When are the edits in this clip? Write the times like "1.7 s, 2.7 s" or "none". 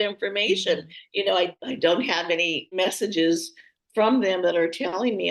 1.5 s, 2.8 s